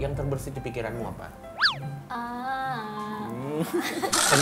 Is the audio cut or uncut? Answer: uncut